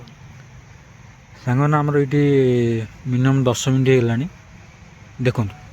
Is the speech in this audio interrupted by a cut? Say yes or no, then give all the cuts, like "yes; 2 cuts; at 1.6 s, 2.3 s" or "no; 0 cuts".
no; 0 cuts